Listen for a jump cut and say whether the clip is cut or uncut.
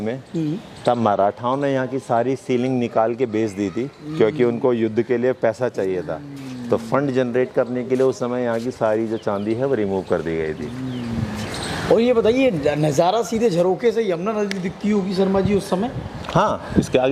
uncut